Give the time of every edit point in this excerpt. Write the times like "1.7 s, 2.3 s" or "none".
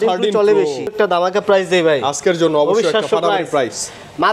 0.9 s